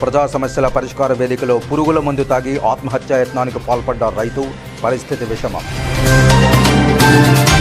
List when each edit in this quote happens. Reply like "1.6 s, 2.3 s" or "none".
none